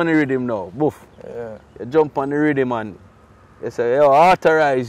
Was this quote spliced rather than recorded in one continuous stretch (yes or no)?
no